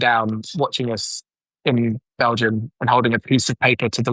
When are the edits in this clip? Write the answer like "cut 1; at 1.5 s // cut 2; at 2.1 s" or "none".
cut 1; at 2.6 s